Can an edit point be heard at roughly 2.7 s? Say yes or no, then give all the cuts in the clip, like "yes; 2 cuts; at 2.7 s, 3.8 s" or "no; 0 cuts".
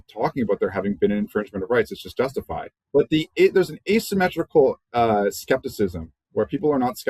yes; 1 cut; at 2.7 s